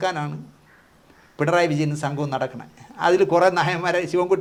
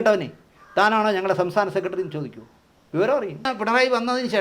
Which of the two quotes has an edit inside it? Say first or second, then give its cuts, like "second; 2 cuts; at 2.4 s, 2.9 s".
second; 1 cut; at 3.5 s